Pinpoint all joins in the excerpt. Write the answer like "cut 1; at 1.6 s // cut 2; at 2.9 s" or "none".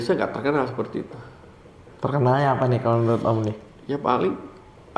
none

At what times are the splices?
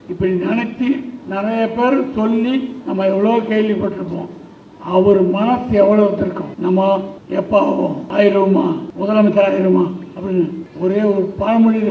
cut 1; at 6.5 s // cut 2; at 7.2 s // cut 3; at 8.0 s // cut 4; at 8.9 s // cut 5; at 10.6 s

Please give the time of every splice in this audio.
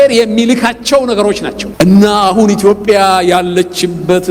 cut 1; at 1.6 s

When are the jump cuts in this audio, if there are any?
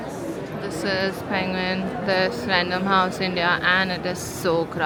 none

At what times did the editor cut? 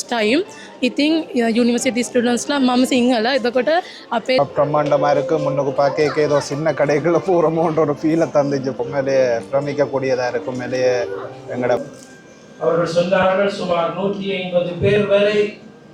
cut 1; at 4.4 s // cut 2; at 8.8 s // cut 3; at 11.8 s

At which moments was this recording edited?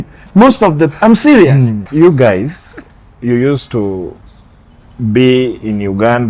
cut 1; at 1.8 s

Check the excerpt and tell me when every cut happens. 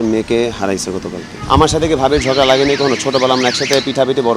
cut 1; at 1.3 s

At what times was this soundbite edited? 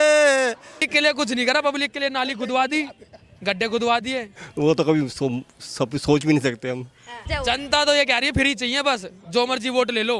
cut 1; at 0.9 s // cut 2; at 4.3 s // cut 3; at 7.2 s

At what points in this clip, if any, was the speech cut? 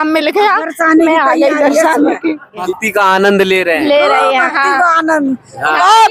cut 1; at 2.6 s

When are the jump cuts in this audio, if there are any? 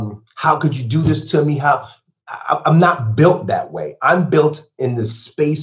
none

